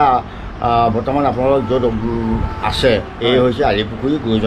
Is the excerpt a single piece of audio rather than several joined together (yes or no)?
yes